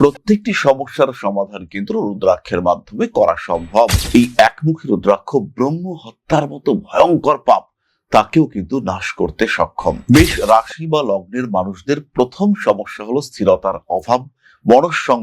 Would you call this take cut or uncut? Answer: cut